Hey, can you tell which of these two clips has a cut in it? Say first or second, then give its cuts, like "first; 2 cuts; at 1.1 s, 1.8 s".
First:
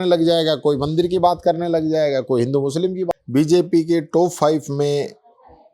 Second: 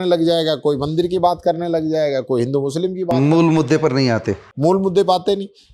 first; 1 cut; at 3.1 s